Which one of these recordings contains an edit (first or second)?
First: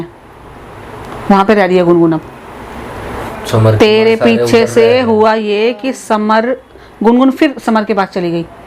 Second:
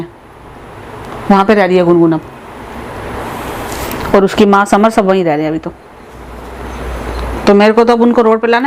first